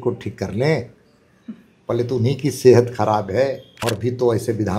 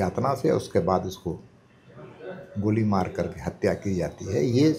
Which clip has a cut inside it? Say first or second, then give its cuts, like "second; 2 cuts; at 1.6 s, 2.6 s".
first; 1 cut; at 3.8 s